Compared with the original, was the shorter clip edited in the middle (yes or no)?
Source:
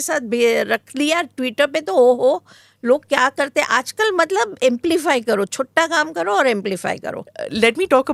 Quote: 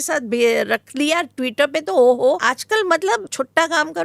yes